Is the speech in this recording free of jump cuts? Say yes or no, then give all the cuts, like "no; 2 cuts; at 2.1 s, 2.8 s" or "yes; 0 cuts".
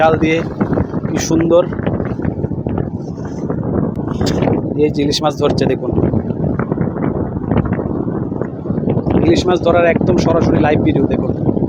yes; 0 cuts